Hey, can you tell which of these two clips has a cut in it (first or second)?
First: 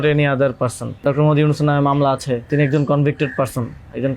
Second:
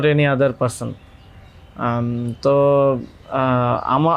first